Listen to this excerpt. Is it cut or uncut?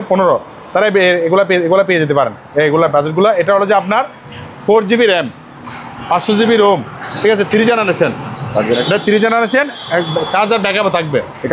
uncut